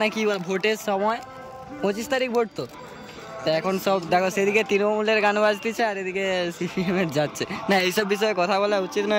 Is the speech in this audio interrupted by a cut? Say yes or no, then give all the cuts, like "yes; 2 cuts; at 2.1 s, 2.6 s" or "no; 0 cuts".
no; 0 cuts